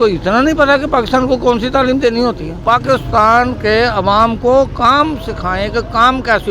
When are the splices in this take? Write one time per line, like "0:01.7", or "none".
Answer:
none